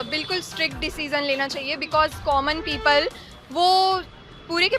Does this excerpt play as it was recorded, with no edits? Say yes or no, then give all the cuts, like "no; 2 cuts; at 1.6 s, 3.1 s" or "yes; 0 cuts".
yes; 0 cuts